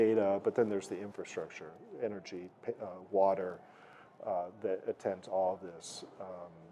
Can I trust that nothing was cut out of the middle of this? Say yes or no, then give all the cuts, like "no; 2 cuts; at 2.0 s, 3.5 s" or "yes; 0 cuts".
yes; 0 cuts